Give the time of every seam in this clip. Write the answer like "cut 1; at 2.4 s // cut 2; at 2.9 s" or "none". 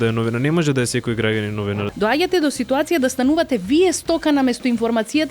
cut 1; at 1.9 s